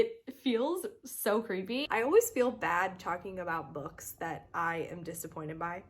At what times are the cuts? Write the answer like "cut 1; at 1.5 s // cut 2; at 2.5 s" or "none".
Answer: cut 1; at 1.8 s

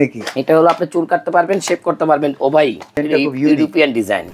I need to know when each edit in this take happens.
cut 1; at 3.0 s

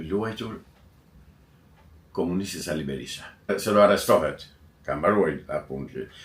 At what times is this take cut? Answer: cut 1; at 3.5 s

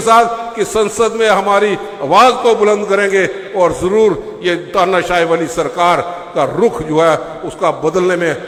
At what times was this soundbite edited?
none

